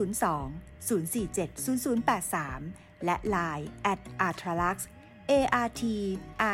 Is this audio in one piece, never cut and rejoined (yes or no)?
yes